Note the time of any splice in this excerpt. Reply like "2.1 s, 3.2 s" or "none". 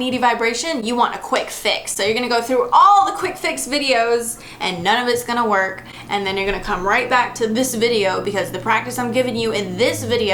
none